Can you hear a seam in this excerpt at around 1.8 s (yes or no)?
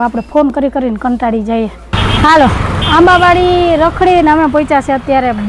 yes